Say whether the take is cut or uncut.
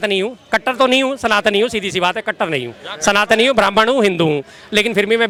uncut